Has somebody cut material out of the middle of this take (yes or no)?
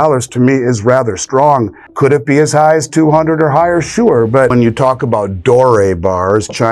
yes